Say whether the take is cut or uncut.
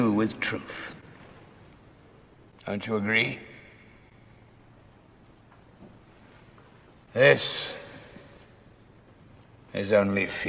uncut